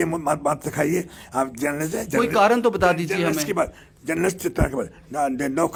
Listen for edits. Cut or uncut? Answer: uncut